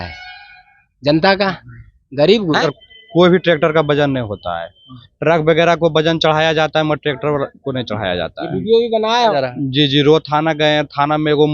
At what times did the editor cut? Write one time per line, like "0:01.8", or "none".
0:02.6
0:09.3